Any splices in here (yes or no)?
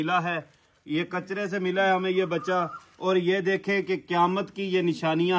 no